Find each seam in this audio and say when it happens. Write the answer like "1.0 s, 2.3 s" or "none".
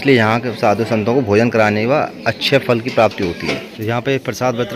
3.7 s